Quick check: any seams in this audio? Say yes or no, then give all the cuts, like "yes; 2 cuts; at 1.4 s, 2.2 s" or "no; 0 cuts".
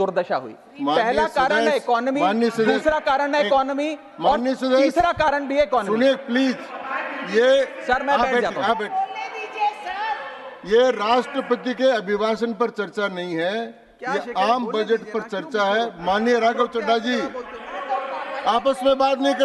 no; 0 cuts